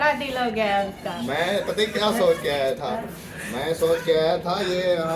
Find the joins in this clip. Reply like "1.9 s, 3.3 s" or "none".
3.0 s